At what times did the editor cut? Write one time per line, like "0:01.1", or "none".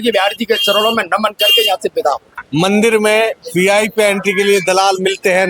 0:02.3